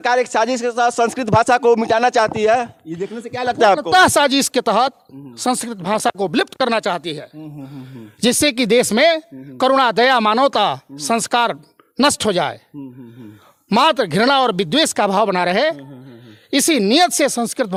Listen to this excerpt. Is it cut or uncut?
uncut